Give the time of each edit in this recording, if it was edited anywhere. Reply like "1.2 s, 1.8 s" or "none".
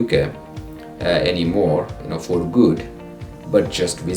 2.0 s